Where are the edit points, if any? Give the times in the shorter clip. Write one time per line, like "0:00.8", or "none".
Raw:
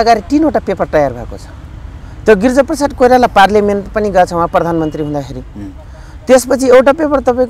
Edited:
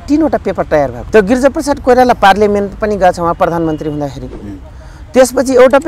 0:01.0